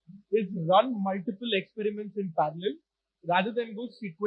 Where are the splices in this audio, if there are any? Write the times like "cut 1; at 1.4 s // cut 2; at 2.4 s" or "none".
none